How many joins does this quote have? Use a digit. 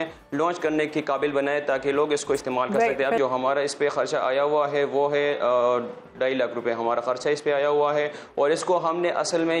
1